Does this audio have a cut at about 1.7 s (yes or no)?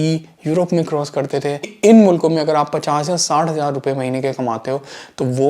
yes